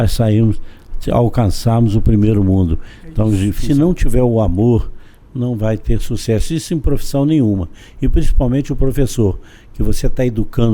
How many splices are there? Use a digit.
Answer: 1